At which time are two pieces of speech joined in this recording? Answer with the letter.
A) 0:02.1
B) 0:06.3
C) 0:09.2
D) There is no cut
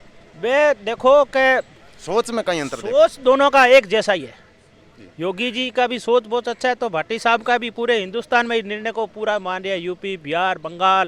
D